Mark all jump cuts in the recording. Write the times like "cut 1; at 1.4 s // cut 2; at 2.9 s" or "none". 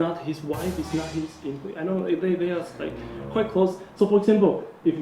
none